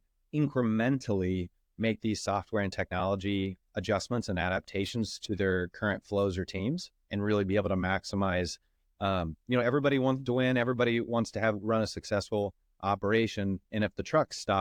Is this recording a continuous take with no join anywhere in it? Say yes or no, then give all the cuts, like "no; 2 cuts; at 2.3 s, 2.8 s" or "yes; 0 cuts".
yes; 0 cuts